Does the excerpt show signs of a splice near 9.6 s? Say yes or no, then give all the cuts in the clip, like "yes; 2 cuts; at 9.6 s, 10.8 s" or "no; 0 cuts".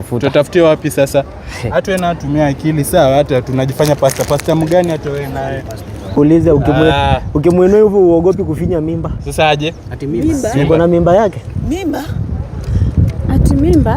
no; 1 cut; at 6.1 s